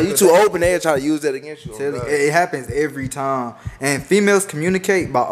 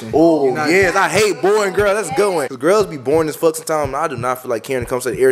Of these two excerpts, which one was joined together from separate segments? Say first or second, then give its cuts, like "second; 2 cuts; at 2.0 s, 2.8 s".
second; 1 cut; at 2.5 s